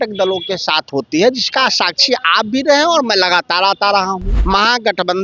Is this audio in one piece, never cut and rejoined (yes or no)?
no